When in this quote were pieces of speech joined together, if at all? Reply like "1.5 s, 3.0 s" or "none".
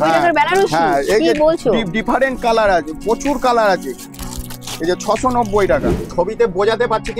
6.0 s